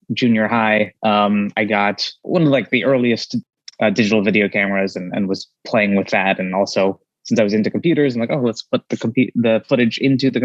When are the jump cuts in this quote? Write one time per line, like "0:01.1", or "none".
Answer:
0:02.2
0:03.3